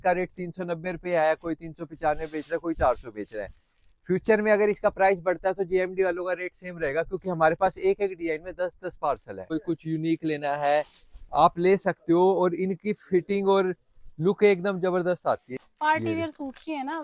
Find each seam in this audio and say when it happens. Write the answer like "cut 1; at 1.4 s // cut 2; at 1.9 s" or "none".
cut 1; at 9.5 s // cut 2; at 15.6 s